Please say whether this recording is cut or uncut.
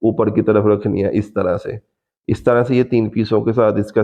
uncut